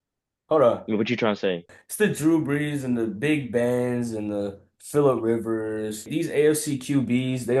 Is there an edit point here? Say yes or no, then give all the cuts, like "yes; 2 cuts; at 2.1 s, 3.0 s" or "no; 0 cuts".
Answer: yes; 2 cuts; at 1.8 s, 6.1 s